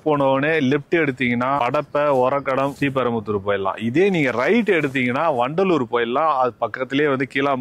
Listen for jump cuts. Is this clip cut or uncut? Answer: uncut